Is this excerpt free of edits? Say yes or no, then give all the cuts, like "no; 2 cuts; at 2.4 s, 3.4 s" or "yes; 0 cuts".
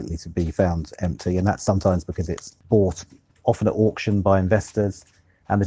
no; 1 cut; at 2.5 s